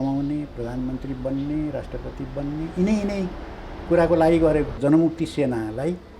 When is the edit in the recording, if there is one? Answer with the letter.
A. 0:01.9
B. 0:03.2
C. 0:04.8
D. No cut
C